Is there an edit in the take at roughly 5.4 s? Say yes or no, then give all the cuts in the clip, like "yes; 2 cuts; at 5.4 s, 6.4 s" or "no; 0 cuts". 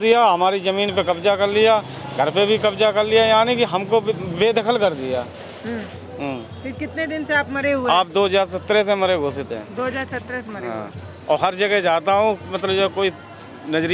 no; 0 cuts